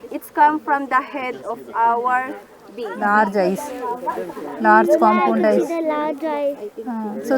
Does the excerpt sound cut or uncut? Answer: cut